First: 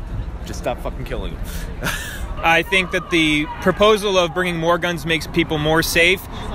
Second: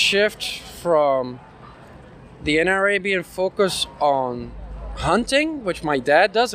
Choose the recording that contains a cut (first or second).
first